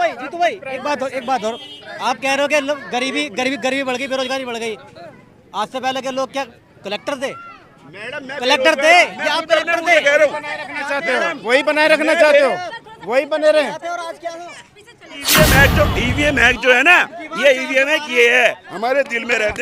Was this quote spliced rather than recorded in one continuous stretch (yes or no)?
yes